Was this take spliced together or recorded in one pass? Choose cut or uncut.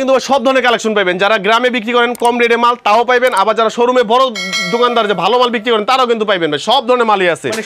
uncut